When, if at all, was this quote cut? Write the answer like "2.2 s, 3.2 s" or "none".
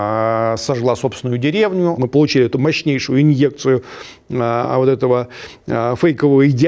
2.0 s